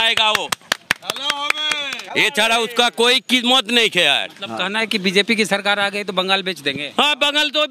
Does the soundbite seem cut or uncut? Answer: uncut